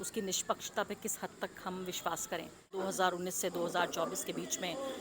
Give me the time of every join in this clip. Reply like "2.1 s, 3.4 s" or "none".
2.7 s